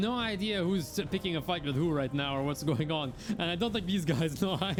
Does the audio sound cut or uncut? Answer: uncut